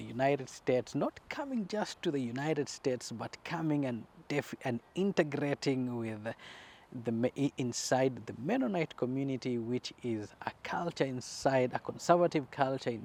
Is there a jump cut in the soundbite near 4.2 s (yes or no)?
no